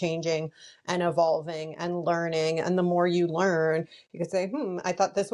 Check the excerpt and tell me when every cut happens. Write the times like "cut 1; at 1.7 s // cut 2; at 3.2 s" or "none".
none